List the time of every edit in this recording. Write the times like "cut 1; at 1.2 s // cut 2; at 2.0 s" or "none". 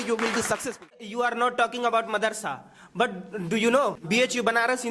cut 1; at 1.1 s // cut 2; at 4.0 s